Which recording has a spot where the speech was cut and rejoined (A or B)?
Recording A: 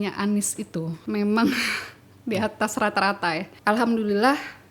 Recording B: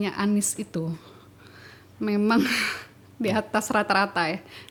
A